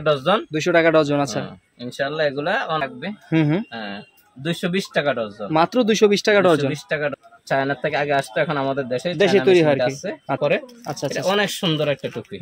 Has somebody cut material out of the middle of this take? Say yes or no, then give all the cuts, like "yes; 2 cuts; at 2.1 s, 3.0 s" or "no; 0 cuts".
yes; 3 cuts; at 2.8 s, 7.1 s, 10.4 s